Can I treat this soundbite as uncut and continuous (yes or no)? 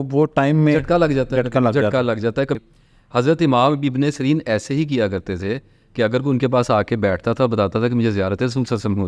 no